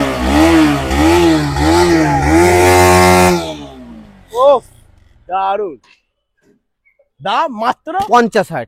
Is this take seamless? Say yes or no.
yes